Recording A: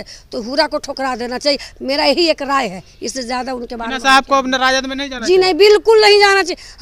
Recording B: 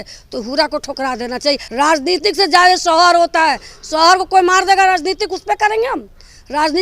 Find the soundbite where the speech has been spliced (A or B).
B